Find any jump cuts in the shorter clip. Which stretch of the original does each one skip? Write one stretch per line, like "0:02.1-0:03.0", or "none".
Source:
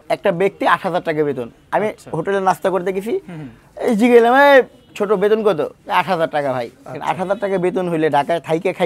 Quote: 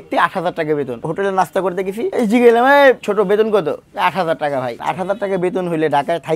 0:01.5-0:02.1
0:03.2-0:03.8
0:04.7-0:05.0
0:06.7-0:07.0